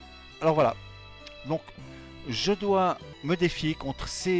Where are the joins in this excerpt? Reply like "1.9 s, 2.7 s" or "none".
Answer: 3.0 s